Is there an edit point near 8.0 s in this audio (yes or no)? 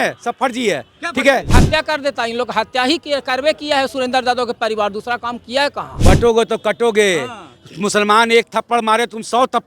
no